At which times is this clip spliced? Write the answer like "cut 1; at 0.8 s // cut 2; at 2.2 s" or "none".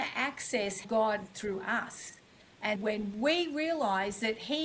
cut 1; at 0.8 s // cut 2; at 2.8 s